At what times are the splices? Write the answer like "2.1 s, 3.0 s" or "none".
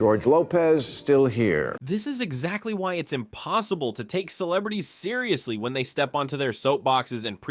none